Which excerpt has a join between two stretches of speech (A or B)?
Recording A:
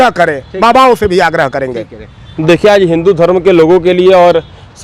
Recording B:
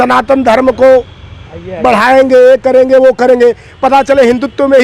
A